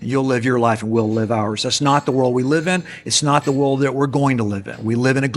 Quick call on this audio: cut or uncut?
uncut